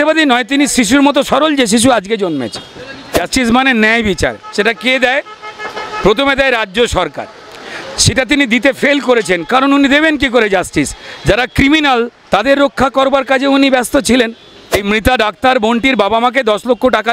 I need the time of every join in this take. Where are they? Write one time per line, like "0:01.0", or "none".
0:03.0
0:14.8